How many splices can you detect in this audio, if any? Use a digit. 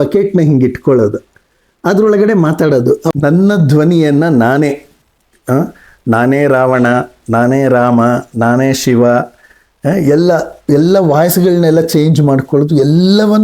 1